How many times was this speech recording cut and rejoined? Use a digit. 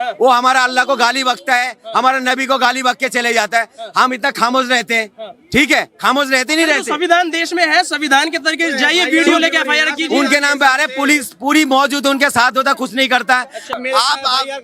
1